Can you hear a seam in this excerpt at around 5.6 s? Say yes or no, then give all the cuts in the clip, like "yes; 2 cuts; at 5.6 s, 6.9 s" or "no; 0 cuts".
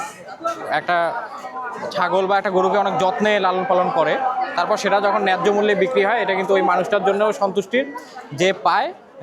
no; 0 cuts